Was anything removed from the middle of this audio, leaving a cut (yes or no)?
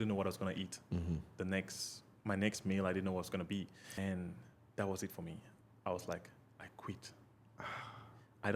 yes